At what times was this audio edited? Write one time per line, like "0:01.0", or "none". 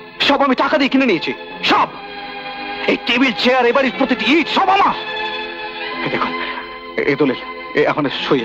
none